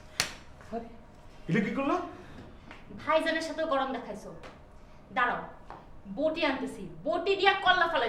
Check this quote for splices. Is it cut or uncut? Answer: uncut